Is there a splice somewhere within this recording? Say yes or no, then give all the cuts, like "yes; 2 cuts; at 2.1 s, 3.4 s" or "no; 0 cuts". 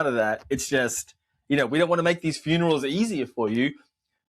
no; 0 cuts